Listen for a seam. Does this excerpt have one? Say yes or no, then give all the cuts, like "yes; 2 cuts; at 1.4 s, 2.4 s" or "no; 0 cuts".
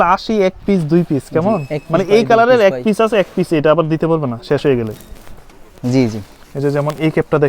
no; 0 cuts